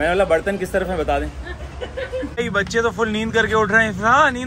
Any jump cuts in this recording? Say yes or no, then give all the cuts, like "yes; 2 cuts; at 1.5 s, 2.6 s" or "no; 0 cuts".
yes; 1 cut; at 2.3 s